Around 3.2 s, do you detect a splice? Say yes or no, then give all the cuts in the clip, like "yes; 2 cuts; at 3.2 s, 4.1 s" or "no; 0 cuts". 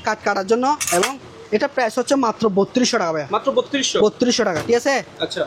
no; 0 cuts